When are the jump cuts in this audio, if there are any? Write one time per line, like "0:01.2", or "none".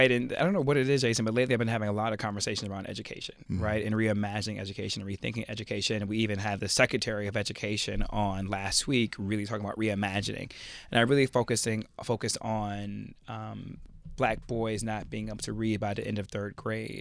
none